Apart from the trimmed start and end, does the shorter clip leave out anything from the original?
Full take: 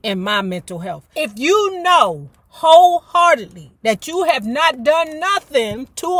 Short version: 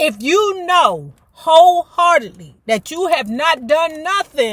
no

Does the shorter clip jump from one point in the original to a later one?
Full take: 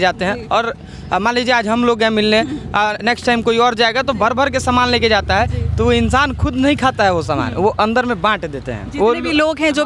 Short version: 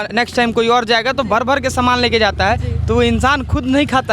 no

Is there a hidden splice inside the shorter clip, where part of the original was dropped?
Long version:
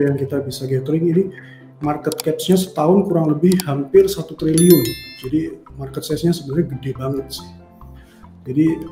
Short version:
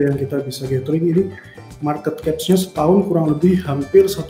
no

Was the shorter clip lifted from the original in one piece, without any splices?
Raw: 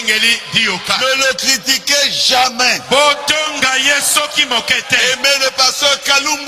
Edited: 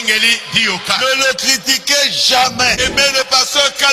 no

